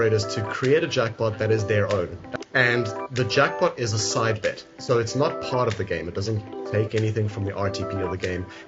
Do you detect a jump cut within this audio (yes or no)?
yes